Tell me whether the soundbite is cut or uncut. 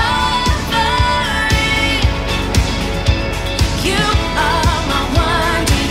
uncut